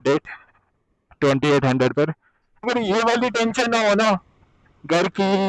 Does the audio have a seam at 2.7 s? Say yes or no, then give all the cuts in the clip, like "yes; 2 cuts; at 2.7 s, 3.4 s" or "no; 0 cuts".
yes; 1 cut; at 2.7 s